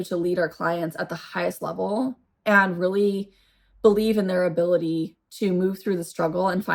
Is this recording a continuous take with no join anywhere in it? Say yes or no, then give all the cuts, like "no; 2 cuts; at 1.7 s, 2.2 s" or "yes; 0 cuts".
yes; 0 cuts